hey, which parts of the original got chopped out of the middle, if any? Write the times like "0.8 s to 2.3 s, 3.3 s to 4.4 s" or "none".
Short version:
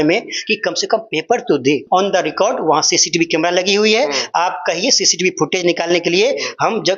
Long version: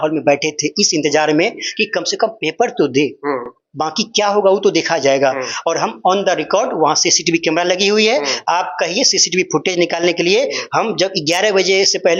3.1 s to 6.0 s

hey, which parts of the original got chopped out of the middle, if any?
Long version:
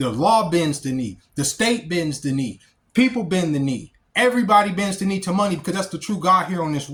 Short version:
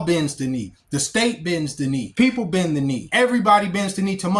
2.5 s to 2.9 s, 3.8 s to 4.1 s

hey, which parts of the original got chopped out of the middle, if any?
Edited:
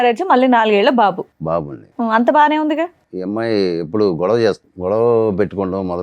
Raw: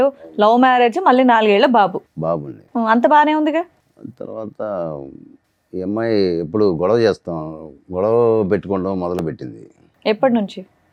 3.8 s to 5.7 s, 7.3 s to 7.8 s

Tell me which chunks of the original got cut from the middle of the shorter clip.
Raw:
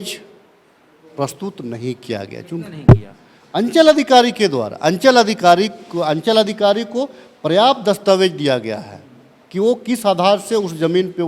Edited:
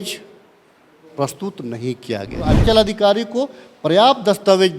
2.4 s to 6.0 s

